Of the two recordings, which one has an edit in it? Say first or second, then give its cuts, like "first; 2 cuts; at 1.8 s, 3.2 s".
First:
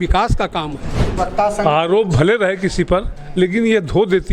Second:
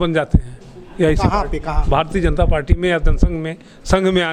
first; 1 cut; at 1.2 s